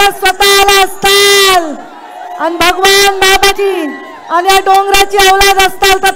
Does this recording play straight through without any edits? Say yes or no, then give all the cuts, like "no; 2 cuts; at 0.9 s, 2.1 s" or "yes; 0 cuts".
no; 1 cut; at 3.7 s